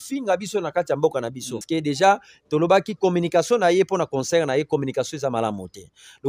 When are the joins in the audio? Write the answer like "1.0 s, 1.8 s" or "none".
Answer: 1.6 s